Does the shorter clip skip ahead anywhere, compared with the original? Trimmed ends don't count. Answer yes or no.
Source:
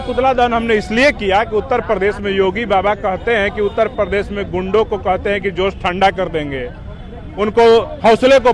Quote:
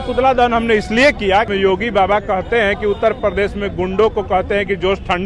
yes